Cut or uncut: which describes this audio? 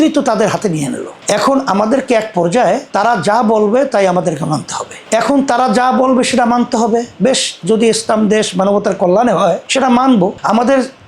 uncut